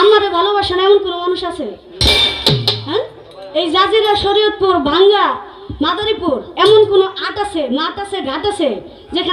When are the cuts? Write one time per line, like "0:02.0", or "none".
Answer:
none